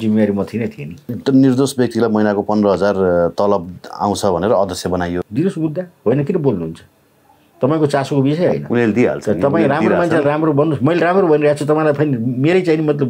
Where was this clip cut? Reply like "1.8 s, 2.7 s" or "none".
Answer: 1.2 s, 5.2 s